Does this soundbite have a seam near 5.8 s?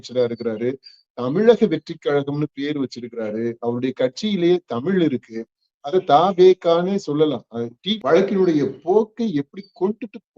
no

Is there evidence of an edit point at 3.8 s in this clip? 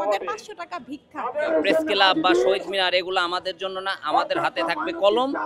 no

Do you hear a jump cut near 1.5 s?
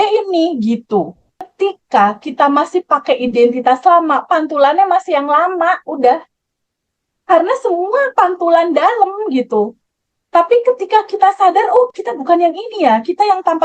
yes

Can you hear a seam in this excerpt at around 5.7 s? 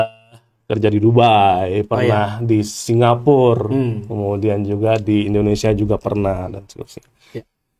no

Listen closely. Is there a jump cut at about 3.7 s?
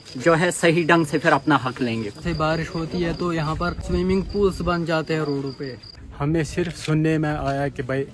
no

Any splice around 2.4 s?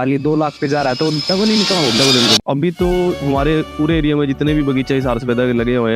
yes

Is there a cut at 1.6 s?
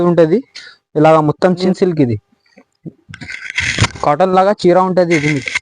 yes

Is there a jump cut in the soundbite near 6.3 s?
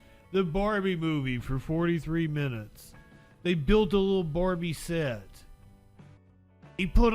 yes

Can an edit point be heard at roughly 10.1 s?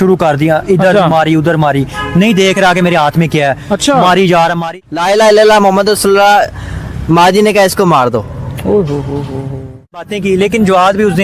yes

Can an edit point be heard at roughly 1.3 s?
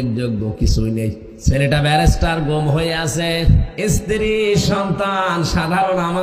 yes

